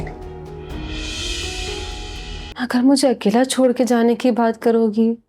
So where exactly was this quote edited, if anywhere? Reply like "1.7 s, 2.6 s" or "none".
2.5 s